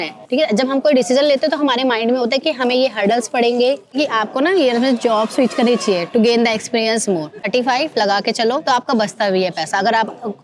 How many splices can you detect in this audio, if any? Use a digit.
2